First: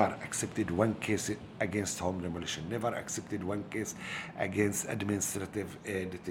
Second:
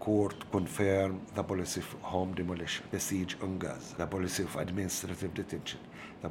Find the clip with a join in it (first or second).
second